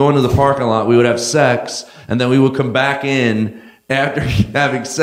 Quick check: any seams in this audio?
yes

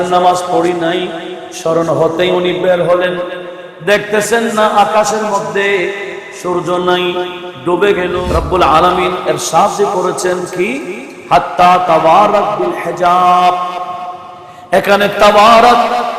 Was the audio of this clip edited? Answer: yes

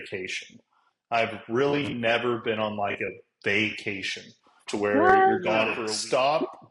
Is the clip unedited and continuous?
no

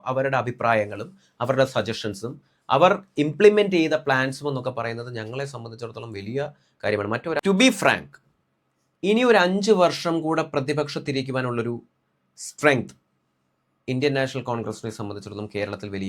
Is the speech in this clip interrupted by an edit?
yes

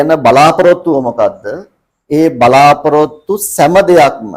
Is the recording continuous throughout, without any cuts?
yes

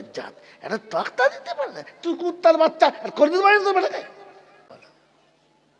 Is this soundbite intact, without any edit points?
no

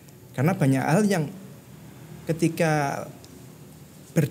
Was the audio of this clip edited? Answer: no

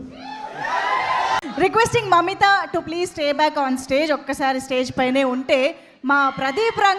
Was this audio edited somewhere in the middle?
yes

